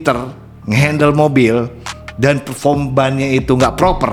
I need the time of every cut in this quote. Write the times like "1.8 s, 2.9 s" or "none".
none